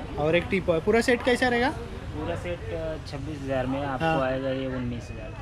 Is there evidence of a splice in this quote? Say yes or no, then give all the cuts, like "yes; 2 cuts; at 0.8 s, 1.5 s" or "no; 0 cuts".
no; 0 cuts